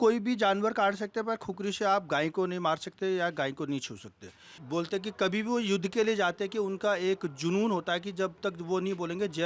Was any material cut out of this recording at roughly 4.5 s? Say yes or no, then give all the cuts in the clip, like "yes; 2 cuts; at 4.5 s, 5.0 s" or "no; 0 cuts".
yes; 1 cut; at 4.5 s